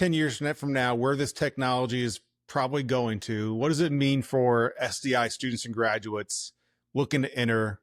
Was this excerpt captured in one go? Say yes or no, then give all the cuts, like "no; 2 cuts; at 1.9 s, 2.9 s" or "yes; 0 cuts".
yes; 0 cuts